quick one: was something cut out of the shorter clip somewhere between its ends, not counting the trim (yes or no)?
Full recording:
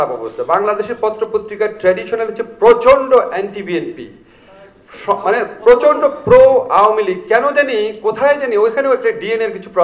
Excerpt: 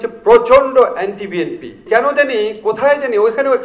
yes